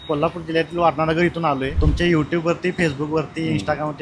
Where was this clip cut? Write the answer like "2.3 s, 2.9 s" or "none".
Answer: 1.8 s